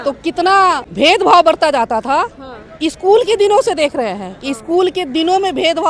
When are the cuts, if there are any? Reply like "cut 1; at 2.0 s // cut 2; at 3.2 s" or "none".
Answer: cut 1; at 0.9 s